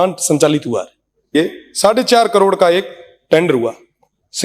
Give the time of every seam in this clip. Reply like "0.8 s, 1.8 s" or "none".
1.3 s